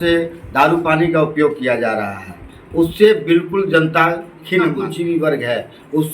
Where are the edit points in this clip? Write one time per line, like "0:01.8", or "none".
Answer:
0:04.9